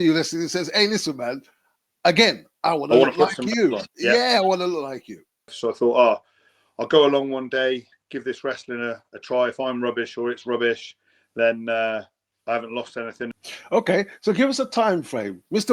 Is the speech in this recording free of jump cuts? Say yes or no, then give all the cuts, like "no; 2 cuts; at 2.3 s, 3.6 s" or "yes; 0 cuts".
no; 2 cuts; at 5.5 s, 13.3 s